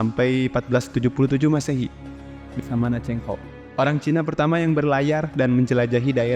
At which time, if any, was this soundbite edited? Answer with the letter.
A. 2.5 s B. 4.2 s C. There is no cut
A